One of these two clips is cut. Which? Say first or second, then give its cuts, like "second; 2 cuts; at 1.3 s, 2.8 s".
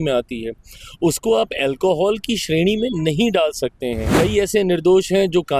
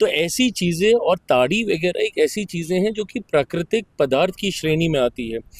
first; 1 cut; at 4.0 s